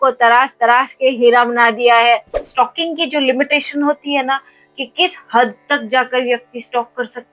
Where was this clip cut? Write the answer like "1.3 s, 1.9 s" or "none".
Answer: 2.4 s